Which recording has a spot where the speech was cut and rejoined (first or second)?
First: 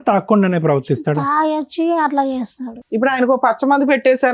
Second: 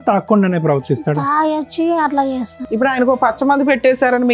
second